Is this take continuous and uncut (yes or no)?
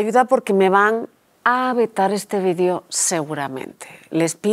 yes